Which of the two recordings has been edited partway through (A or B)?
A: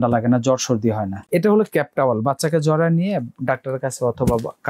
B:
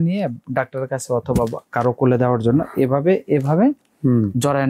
A